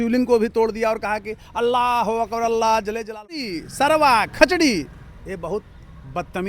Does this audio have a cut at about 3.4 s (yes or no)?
yes